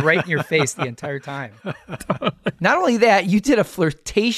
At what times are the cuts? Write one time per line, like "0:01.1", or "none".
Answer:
0:02.6